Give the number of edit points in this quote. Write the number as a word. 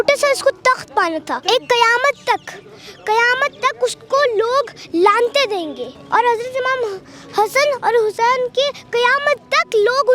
two